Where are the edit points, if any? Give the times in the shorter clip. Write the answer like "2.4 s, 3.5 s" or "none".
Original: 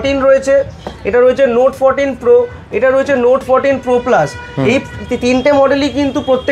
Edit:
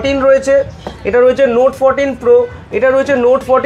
none